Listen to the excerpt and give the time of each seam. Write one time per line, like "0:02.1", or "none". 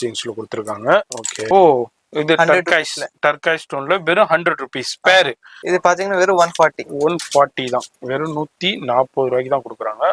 0:01.3
0:05.5